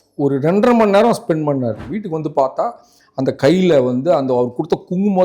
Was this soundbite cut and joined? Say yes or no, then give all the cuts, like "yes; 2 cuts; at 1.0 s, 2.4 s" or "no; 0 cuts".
yes; 1 cut; at 1.9 s